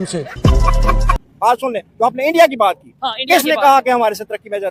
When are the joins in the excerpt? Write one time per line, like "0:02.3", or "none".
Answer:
0:01.2